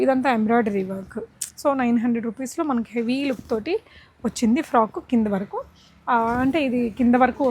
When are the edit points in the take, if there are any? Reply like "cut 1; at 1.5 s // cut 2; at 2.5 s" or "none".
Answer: none